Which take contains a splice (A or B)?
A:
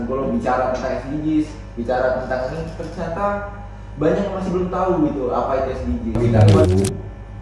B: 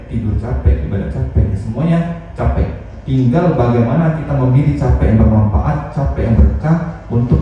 A